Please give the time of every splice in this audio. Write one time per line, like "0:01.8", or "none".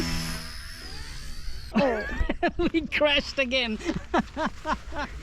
0:01.7